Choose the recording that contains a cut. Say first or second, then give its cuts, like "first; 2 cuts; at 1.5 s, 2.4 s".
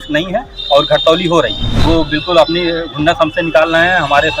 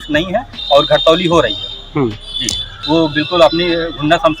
first; 1 cut; at 1.7 s